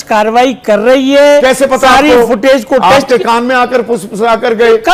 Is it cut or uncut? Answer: uncut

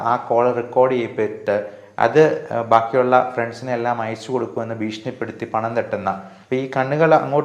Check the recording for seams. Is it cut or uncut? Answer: cut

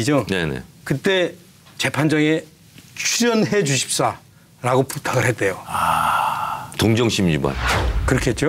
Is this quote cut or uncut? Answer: uncut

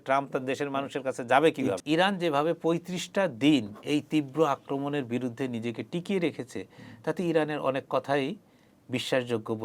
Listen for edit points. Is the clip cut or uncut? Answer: cut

